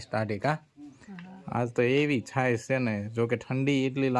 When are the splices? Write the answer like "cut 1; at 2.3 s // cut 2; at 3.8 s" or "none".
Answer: none